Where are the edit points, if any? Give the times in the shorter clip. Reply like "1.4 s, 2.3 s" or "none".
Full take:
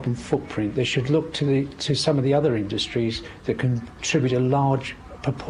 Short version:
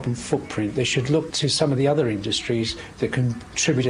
1.3 s